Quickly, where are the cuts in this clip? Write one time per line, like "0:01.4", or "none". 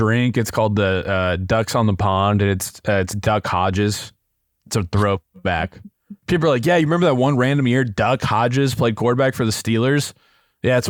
none